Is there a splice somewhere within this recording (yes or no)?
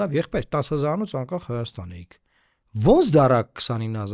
no